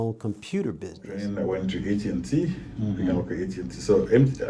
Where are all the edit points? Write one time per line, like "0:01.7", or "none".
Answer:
0:01.3